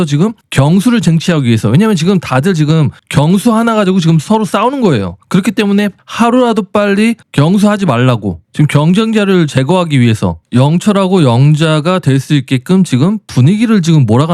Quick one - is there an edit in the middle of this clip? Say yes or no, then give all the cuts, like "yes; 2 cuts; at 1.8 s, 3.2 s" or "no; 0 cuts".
no; 0 cuts